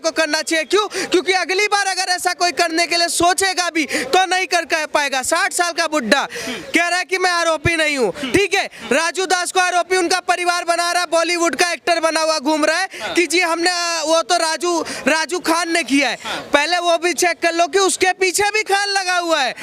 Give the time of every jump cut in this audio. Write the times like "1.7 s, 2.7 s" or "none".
none

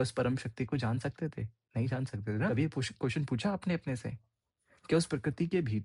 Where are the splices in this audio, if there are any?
2.5 s

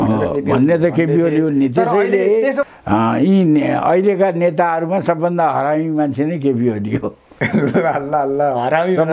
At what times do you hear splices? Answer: 2.6 s

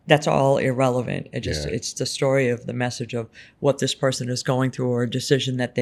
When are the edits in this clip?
none

